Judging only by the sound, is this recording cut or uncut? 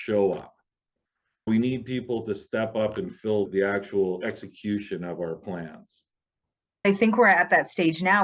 cut